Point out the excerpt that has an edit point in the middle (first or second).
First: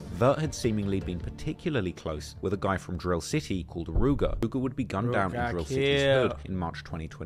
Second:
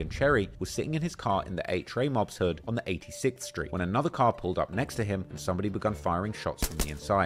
first